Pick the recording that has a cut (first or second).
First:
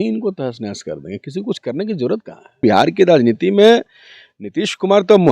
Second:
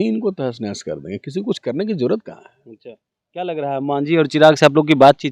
first